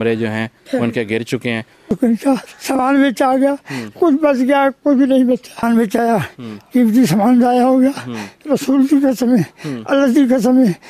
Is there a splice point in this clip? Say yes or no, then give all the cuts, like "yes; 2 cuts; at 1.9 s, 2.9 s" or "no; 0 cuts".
yes; 2 cuts; at 1.9 s, 5.6 s